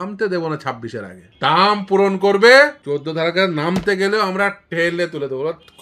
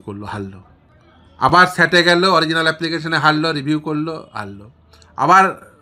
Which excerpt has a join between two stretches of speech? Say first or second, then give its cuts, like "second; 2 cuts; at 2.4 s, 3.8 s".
first; 2 cuts; at 1.2 s, 2.8 s